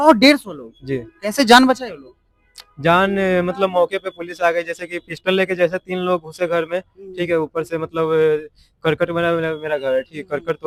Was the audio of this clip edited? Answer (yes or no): no